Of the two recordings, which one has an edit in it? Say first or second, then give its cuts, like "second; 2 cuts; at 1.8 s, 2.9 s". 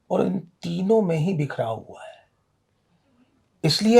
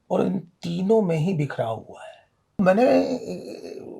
second; 1 cut; at 2.6 s